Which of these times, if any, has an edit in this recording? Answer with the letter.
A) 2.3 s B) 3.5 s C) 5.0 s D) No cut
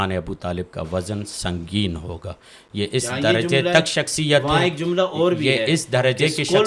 D